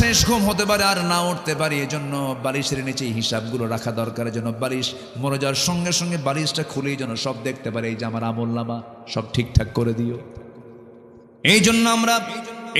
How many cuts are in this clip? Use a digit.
1